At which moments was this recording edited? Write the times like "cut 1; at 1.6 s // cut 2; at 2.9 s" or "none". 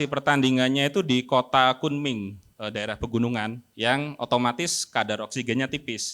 cut 1; at 2.4 s // cut 2; at 3.6 s